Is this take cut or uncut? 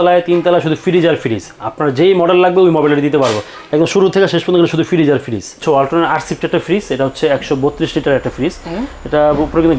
cut